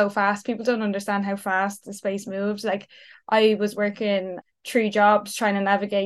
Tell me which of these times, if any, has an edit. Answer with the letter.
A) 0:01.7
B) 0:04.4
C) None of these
B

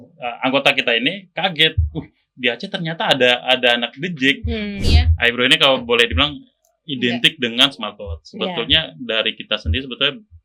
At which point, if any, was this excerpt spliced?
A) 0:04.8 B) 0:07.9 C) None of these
A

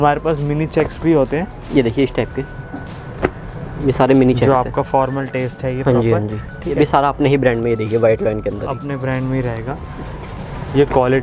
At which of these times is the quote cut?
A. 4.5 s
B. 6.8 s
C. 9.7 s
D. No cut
B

